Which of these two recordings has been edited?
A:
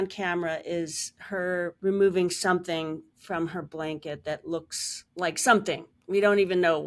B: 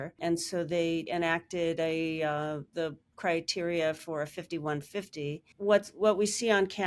B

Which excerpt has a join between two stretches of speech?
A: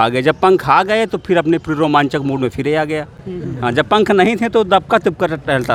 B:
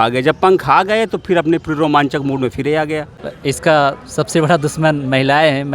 B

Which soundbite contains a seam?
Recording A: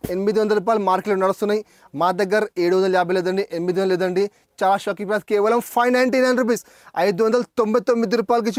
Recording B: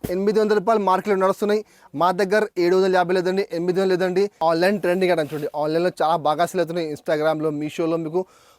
B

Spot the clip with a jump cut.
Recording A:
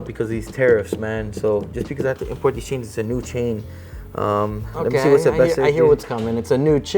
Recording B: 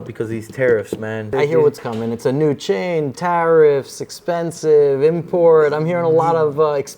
B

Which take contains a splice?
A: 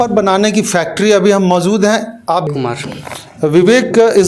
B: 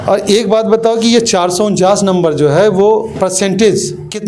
A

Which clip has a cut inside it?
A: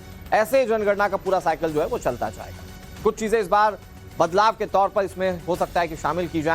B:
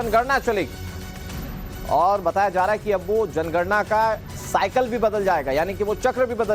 A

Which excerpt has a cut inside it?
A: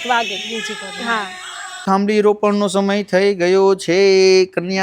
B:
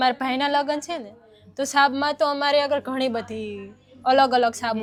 A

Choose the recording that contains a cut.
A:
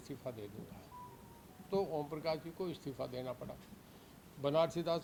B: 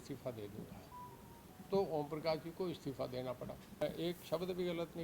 B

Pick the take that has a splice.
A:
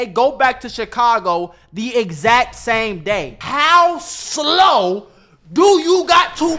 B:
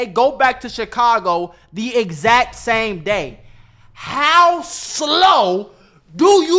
A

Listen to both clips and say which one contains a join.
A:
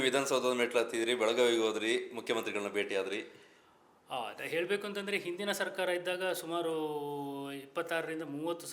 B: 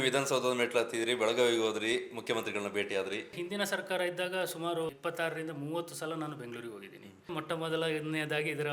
B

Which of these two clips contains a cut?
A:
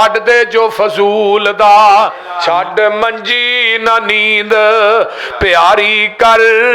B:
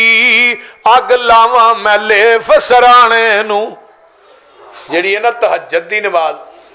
A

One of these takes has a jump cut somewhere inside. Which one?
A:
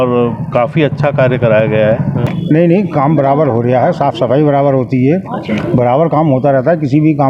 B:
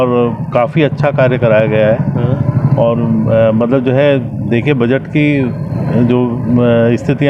A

